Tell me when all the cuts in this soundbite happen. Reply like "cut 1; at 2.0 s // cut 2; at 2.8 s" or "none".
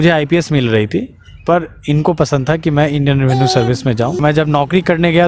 cut 1; at 4.2 s